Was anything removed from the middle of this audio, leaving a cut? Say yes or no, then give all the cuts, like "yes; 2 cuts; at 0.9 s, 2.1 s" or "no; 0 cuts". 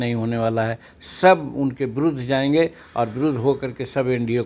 no; 0 cuts